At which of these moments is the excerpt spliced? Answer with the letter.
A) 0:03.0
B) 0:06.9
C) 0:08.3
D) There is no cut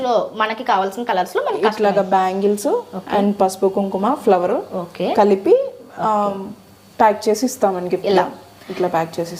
D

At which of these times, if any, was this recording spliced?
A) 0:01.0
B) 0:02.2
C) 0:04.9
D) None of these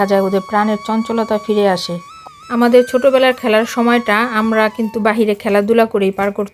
B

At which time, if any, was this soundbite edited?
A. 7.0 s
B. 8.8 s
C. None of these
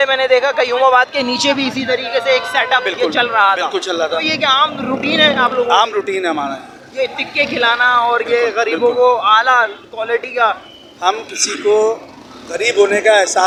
C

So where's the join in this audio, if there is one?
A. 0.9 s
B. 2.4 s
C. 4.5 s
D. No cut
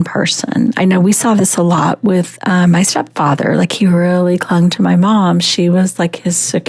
D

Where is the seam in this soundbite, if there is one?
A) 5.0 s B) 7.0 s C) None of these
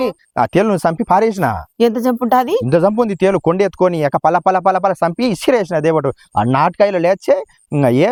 C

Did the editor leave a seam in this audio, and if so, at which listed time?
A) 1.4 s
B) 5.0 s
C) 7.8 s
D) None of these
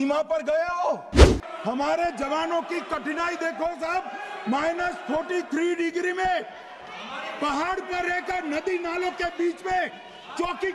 A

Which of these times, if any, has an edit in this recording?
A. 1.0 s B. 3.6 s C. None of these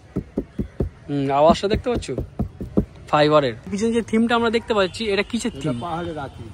B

